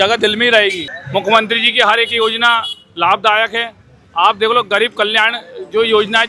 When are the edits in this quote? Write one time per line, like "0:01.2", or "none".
0:00.9